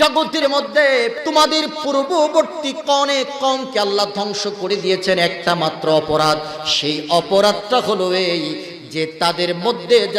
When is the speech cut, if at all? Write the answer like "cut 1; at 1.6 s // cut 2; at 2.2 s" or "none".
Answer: cut 1; at 1.2 s